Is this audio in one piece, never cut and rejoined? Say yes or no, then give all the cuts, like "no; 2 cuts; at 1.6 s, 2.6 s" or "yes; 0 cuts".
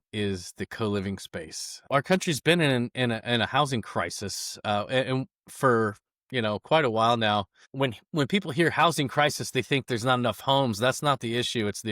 no; 2 cuts; at 1.7 s, 7.6 s